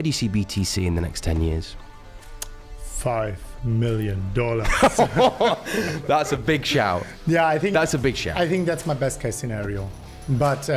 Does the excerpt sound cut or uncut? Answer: uncut